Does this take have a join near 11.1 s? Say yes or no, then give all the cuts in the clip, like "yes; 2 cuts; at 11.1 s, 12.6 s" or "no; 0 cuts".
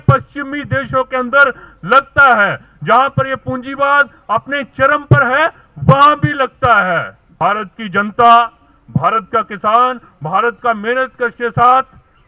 no; 1 cut; at 7.2 s